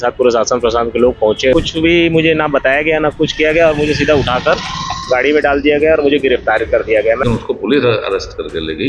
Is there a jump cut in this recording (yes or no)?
yes